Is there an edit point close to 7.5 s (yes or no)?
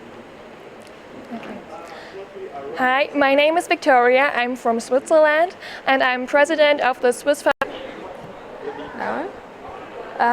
yes